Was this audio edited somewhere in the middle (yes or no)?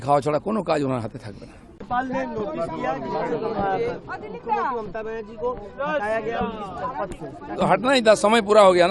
yes